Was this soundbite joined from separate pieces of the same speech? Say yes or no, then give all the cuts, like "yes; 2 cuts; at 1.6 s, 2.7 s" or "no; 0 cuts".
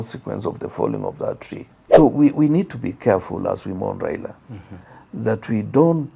yes; 1 cut; at 2.0 s